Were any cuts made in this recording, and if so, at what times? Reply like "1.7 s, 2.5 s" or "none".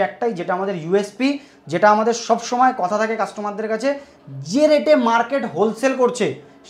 none